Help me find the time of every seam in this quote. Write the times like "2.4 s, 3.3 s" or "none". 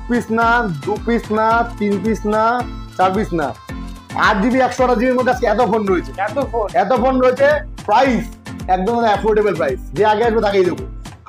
none

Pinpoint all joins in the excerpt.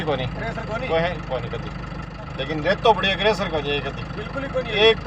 2.1 s

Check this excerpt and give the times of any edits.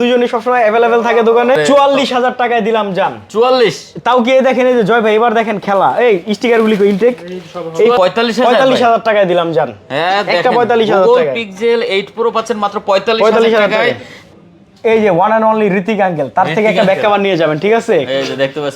1.6 s, 8.0 s, 14.2 s

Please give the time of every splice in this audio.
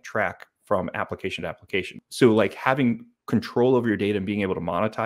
2.0 s

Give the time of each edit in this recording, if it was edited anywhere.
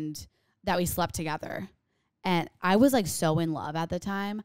2.5 s

